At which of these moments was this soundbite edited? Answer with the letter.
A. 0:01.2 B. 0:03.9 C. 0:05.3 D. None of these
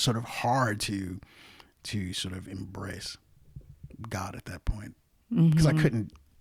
D